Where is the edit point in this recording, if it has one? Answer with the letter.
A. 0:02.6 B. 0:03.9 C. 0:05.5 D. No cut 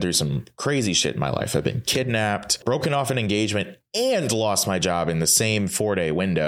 A